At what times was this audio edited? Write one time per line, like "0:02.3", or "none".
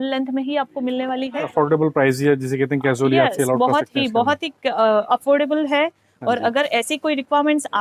0:01.4